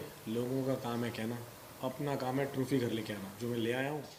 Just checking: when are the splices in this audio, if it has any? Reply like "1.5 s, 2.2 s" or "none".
none